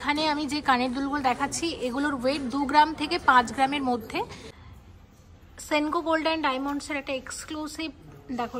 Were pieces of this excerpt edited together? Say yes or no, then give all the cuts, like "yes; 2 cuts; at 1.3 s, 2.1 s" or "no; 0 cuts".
yes; 1 cut; at 4.4 s